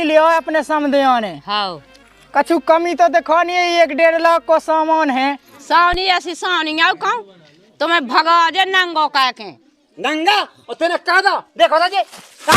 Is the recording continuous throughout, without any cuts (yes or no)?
no